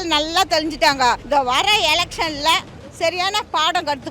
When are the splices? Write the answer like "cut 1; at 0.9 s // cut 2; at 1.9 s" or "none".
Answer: cut 1; at 1.2 s